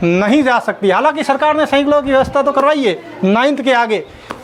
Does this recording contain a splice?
no; 0 cuts

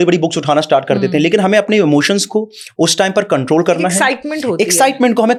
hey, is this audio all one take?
yes; 0 cuts

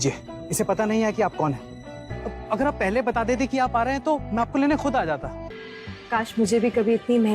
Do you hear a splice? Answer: yes; 1 cut; at 5.4 s

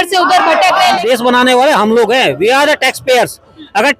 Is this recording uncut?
no; 1 cut; at 1.0 s

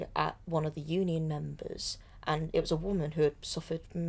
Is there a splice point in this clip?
no; 0 cuts

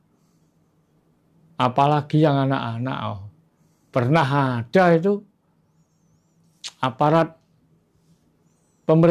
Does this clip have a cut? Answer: no; 0 cuts

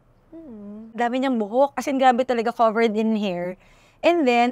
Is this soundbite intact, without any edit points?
no; 1 cut; at 1.0 s

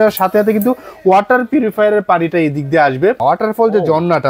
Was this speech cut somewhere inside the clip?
yes; 1 cut; at 3.2 s

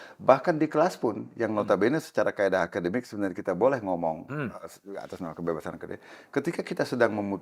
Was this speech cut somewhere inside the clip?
no; 0 cuts

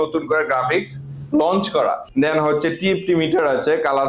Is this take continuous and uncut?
no; 1 cut; at 2.0 s

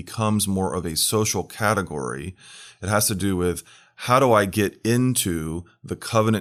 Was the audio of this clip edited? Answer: no; 0 cuts

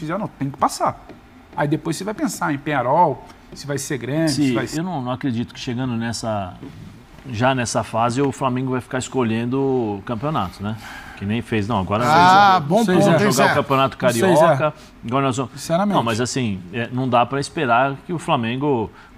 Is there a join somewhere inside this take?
yes; 1 cut; at 4.3 s

